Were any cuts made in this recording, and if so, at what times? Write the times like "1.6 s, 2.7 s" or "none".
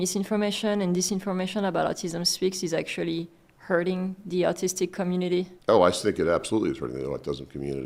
none